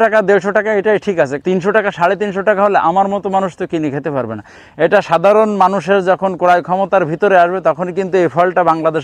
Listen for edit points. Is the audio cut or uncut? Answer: cut